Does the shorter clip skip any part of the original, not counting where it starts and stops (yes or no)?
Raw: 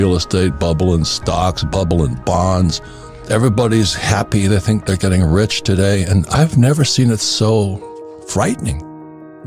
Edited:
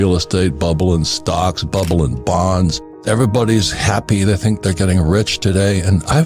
yes